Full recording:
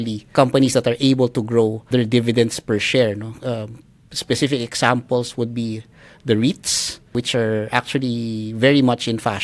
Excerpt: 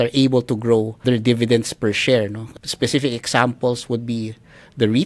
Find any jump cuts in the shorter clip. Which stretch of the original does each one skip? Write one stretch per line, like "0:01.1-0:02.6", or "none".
0:03.3-0:03.9